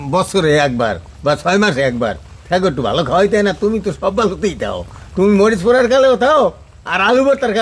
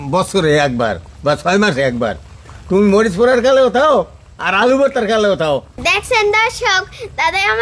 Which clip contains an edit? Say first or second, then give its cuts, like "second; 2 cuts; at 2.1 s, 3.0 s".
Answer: second; 2 cuts; at 2.3 s, 5.8 s